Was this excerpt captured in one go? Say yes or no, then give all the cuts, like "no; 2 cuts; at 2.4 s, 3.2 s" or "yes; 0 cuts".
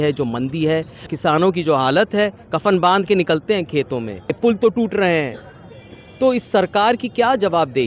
no; 2 cuts; at 1.1 s, 4.4 s